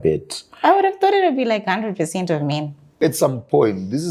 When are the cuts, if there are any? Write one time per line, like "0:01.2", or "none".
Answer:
0:02.9